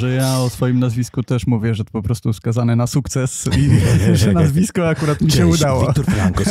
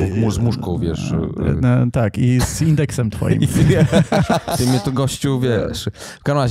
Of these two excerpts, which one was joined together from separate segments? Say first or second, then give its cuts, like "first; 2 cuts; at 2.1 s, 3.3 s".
second; 1 cut; at 4.5 s